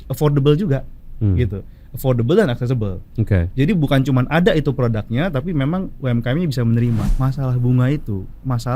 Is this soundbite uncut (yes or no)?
no